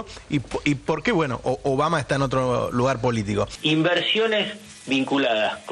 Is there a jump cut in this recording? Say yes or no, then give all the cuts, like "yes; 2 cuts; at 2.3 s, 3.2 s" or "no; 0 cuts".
no; 0 cuts